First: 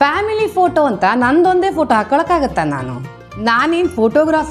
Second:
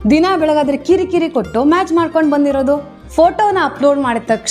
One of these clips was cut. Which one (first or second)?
second